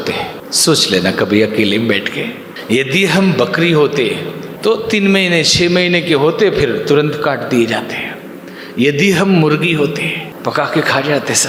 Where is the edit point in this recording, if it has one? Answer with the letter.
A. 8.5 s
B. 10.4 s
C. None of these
C